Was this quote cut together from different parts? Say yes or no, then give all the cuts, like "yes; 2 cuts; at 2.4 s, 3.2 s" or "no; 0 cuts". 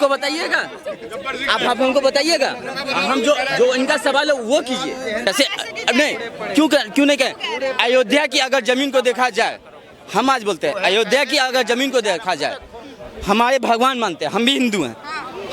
yes; 1 cut; at 5.3 s